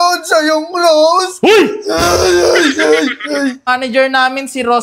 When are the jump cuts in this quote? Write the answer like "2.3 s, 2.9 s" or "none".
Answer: 3.7 s